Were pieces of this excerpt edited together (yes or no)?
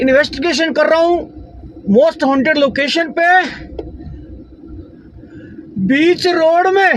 no